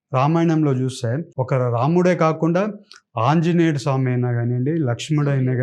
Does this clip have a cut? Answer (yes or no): yes